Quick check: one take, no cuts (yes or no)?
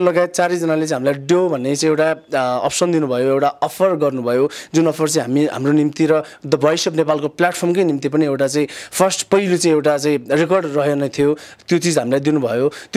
yes